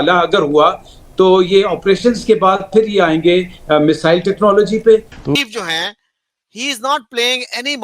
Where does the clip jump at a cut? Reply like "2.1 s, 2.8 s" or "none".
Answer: 5.2 s